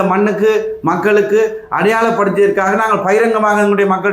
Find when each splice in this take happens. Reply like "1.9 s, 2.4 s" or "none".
none